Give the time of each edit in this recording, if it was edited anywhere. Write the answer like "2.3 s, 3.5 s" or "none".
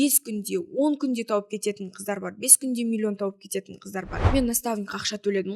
4.2 s